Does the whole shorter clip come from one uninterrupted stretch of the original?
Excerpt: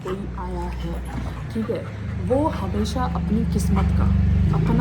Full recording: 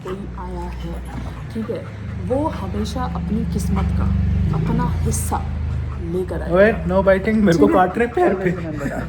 yes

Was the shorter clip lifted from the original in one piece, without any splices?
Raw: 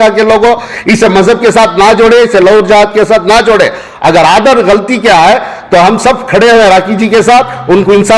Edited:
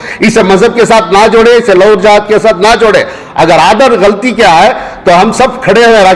yes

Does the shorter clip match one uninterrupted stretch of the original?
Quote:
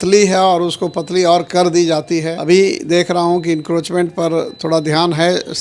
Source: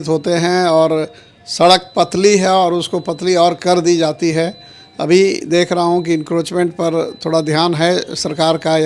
no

